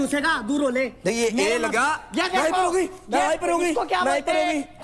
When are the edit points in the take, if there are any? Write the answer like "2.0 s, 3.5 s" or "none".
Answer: 0.9 s